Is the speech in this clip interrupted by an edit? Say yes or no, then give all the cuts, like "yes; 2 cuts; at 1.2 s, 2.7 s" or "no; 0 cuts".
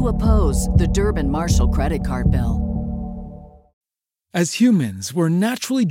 yes; 1 cut; at 3.7 s